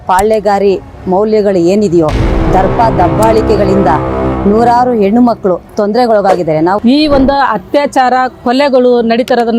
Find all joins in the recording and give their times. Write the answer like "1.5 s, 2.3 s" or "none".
6.8 s